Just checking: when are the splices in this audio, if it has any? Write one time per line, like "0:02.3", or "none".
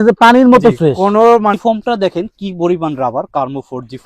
0:01.8